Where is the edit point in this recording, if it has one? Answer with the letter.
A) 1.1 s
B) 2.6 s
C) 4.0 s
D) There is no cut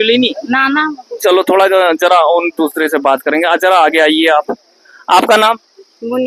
D